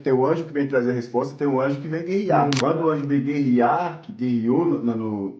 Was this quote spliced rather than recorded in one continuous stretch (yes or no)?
yes